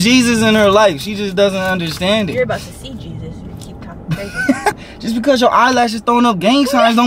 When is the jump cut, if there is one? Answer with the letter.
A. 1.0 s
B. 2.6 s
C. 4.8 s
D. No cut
C